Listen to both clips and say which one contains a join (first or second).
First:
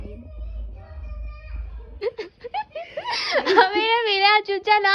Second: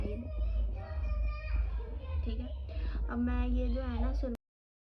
first